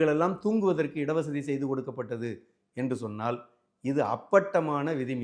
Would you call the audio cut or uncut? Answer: uncut